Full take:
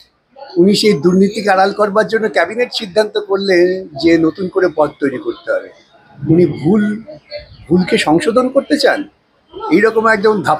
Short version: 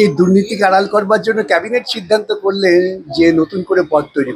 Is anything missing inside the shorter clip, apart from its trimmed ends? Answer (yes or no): no